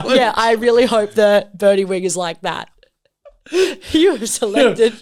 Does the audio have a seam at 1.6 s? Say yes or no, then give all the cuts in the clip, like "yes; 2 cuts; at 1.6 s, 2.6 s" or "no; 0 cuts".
no; 0 cuts